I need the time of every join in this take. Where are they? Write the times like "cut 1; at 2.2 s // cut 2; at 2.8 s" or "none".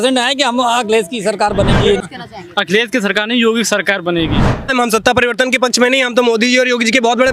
cut 1; at 2.0 s // cut 2; at 4.7 s